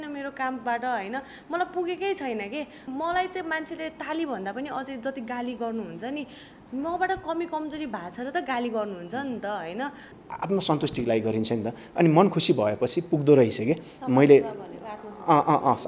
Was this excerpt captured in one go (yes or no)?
no